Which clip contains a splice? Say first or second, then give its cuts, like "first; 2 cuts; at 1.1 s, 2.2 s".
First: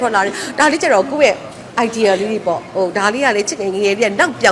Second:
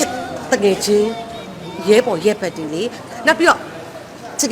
second; 1 cut; at 3.0 s